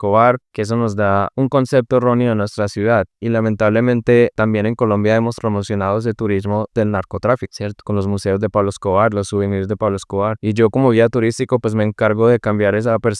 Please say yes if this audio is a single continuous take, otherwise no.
yes